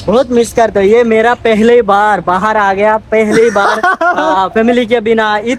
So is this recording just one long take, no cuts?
yes; 0 cuts

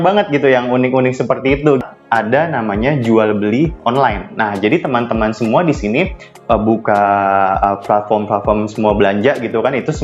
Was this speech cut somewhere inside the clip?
yes; 1 cut; at 1.8 s

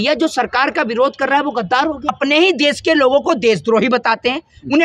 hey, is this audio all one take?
no; 1 cut; at 2.1 s

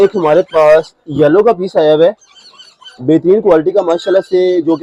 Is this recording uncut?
yes; 0 cuts

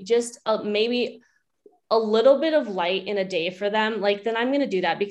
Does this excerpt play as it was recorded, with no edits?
yes; 0 cuts

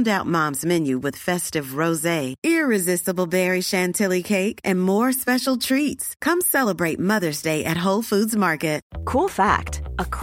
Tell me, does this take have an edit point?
yes; 1 cut; at 8.9 s

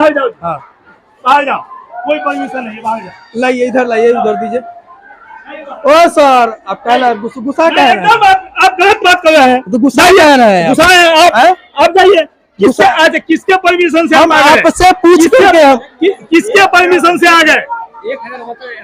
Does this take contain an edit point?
no; 0 cuts

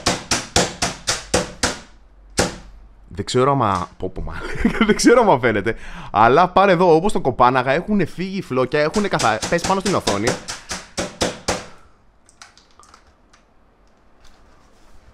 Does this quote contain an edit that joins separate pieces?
no; 0 cuts

